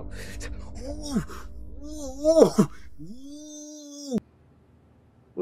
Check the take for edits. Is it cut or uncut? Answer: cut